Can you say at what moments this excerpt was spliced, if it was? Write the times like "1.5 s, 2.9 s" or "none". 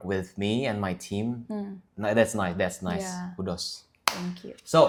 none